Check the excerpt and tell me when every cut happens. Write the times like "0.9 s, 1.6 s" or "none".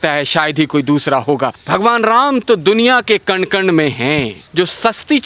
1.6 s, 4.4 s